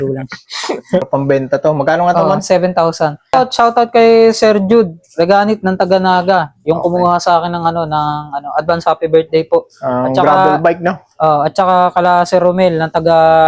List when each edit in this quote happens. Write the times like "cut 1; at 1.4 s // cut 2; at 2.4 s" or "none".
cut 1; at 1.1 s // cut 2; at 3.3 s